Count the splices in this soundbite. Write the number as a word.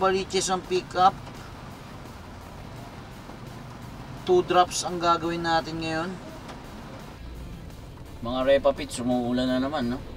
one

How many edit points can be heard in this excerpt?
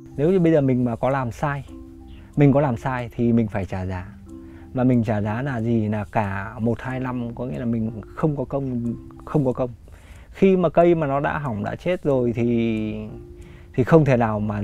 zero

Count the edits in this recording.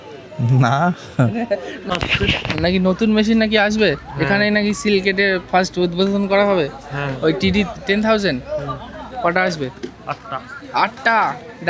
one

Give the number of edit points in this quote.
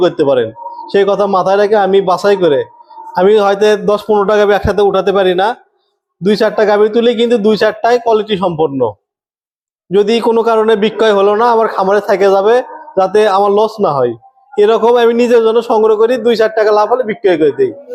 zero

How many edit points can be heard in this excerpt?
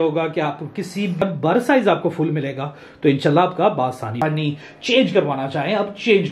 two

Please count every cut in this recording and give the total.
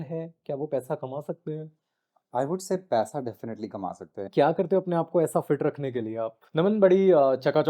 two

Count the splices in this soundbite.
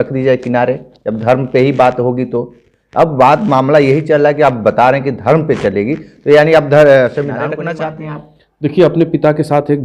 one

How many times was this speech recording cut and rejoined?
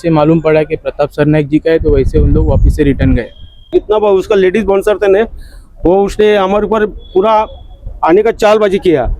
one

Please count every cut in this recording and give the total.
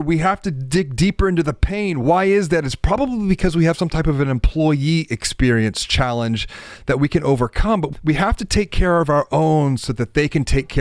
zero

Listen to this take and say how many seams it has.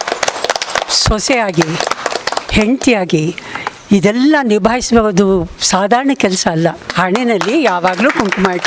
one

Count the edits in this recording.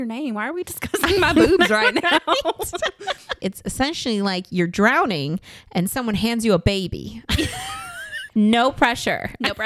two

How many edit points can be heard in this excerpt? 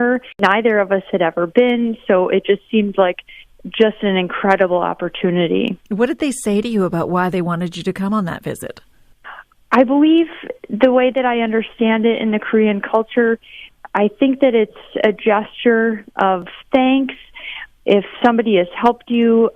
zero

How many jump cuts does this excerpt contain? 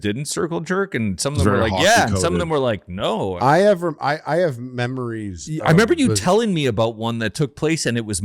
one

